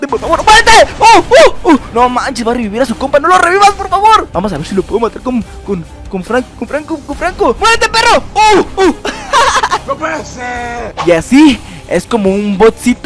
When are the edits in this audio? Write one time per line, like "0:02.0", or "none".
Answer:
0:01.9
0:04.3
0:07.6
0:10.9